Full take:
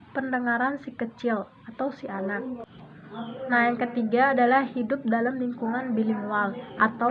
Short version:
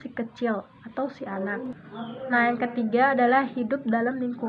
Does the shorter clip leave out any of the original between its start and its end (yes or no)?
yes